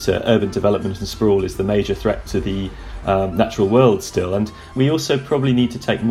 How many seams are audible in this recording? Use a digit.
1